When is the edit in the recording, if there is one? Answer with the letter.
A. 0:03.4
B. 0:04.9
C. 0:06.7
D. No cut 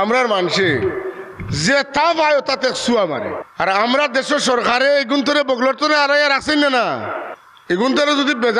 A